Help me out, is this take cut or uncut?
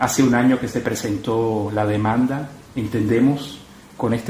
uncut